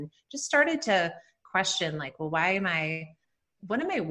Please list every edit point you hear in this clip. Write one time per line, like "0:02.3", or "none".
none